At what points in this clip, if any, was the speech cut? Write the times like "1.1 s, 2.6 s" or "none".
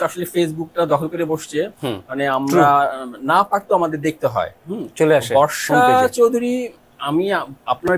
none